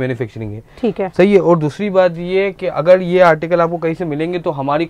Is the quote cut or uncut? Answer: uncut